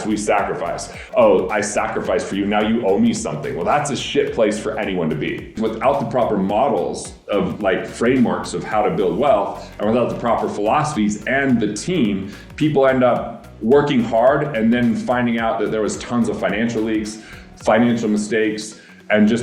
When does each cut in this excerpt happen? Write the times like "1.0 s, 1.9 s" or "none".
1.0 s, 5.6 s